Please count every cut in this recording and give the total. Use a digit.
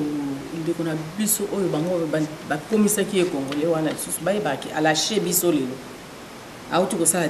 0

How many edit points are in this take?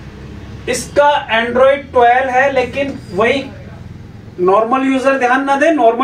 0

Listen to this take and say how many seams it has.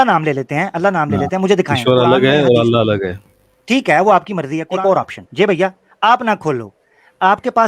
1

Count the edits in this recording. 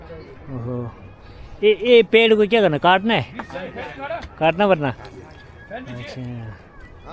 0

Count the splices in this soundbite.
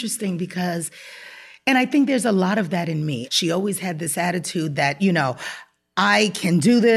1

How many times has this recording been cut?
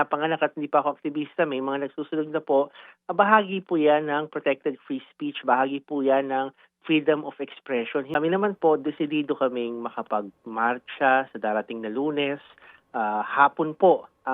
1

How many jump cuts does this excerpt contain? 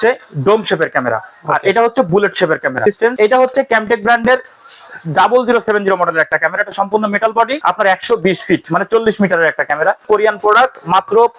3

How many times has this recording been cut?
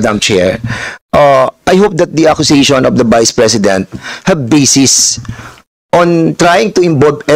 0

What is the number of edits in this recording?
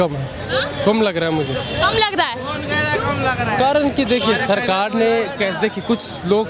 0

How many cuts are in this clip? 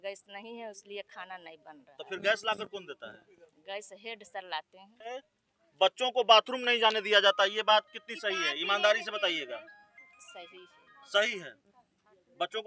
1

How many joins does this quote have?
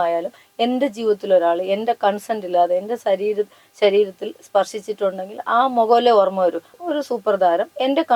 1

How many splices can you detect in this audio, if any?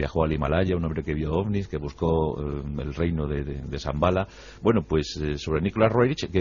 1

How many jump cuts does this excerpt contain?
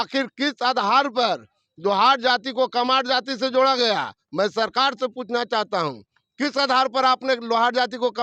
0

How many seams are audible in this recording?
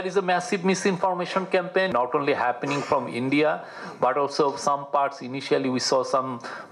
1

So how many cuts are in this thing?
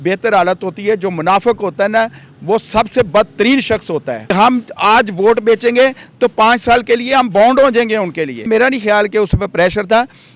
2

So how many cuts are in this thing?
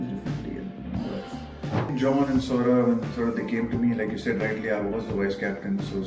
1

